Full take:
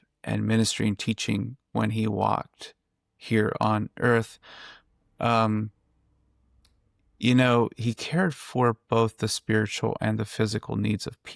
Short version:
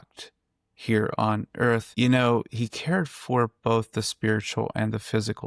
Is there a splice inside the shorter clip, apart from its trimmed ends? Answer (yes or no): yes